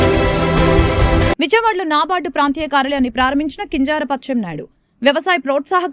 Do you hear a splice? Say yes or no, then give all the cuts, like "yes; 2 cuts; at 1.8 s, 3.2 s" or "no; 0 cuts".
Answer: yes; 1 cut; at 1.3 s